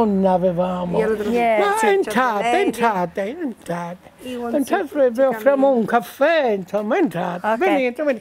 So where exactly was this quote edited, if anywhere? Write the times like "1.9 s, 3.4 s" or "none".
1.2 s